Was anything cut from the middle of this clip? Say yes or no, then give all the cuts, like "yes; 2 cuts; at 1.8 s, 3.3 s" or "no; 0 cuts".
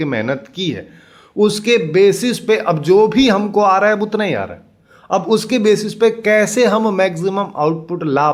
no; 0 cuts